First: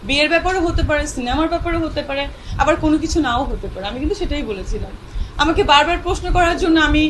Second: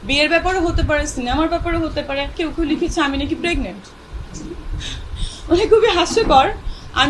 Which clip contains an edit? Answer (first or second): second